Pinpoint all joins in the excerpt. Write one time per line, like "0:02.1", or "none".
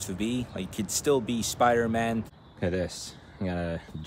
0:02.4